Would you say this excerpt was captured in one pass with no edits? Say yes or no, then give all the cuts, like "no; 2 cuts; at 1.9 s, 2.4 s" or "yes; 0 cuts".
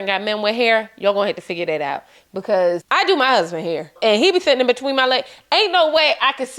no; 2 cuts; at 2.9 s, 3.9 s